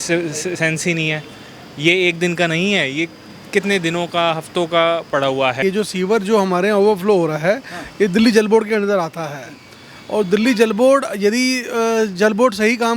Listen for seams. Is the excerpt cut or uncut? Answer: cut